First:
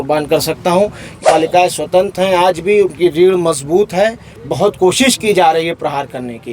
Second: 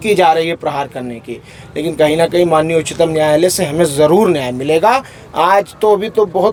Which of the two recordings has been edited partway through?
first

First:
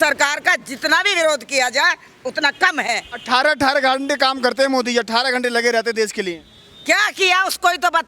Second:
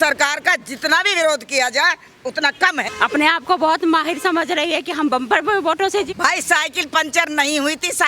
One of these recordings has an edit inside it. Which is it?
second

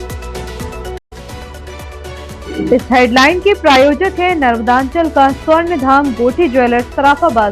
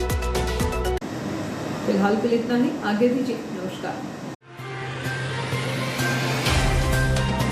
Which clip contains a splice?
first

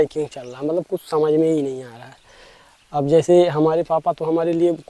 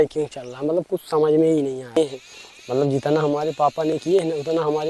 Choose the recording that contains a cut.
second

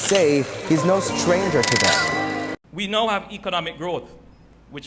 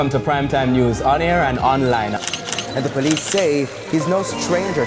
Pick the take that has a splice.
first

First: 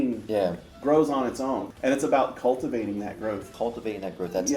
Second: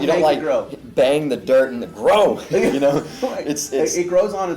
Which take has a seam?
first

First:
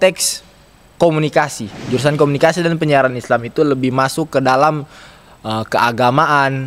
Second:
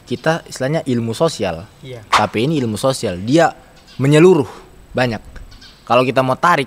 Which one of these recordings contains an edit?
first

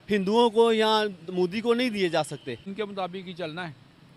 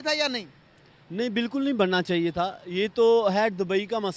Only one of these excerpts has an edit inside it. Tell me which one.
first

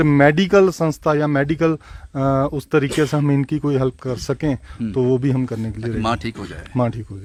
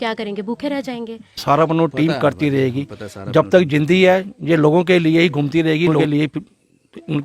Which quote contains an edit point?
second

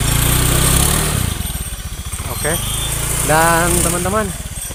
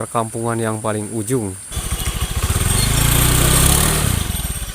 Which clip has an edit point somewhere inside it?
second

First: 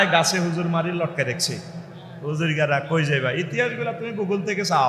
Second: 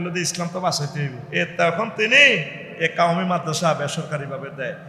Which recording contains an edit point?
second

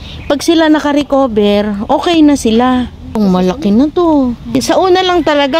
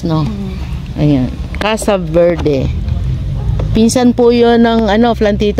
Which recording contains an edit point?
first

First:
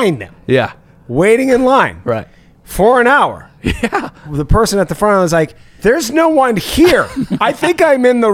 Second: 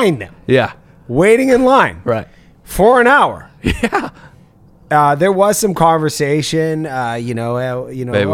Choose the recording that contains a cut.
first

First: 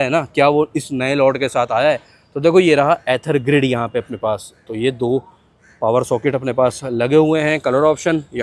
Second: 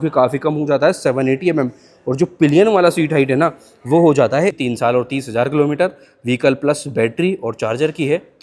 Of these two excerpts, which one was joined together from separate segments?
second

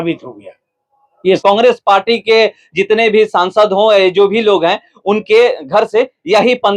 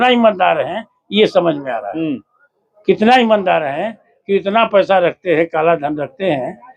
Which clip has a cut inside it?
first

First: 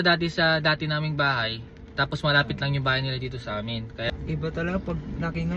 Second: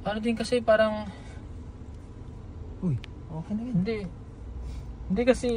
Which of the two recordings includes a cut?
first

